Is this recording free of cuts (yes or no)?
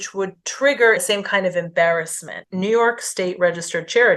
no